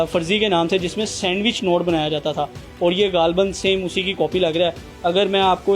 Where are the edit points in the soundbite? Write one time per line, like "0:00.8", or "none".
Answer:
none